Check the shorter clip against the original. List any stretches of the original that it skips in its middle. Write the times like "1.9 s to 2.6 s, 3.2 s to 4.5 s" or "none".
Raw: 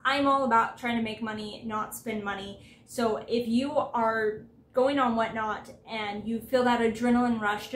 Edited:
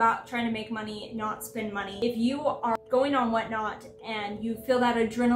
2.5 s to 3.3 s, 4.1 s to 4.7 s